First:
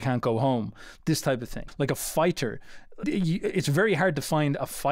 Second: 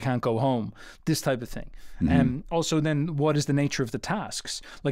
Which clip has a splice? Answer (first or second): first